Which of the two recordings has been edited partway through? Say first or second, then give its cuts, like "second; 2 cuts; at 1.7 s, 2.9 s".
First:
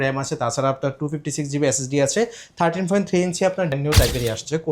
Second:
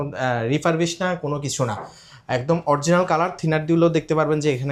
first; 1 cut; at 3.8 s